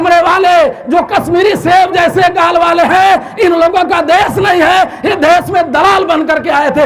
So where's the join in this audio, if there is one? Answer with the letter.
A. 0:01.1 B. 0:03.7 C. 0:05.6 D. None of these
D